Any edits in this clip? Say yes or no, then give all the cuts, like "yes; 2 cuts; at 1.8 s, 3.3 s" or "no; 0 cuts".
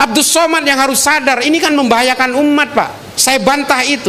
yes; 1 cut; at 3.0 s